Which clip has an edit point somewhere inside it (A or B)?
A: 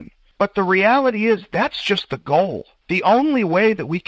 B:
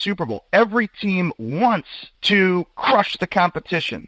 A